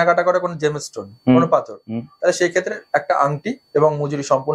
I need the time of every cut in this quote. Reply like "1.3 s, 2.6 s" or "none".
none